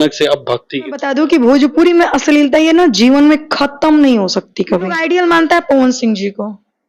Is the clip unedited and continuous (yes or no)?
no